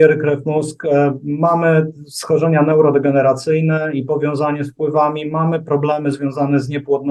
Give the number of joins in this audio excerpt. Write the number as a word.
zero